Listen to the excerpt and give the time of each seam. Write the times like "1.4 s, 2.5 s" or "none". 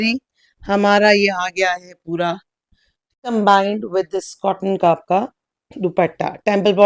3.3 s